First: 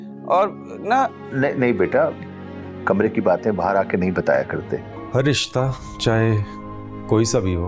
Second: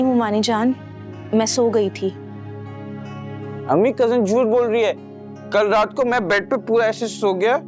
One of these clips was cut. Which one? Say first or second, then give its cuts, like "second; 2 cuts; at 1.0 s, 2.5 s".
first; 1 cut; at 5.0 s